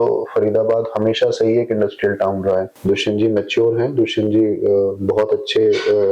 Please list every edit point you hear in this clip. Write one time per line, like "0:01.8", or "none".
0:02.8